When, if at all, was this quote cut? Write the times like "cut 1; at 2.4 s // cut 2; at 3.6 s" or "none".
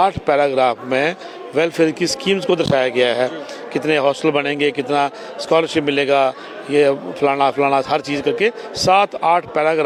none